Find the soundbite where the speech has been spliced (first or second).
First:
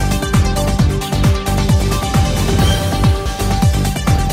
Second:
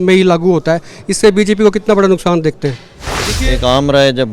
second